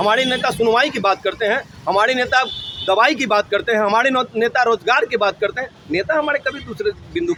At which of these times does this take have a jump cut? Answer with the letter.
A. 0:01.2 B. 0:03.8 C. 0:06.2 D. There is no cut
D